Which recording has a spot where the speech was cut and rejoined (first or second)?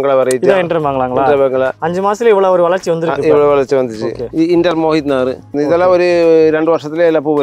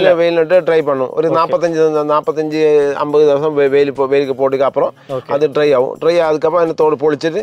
first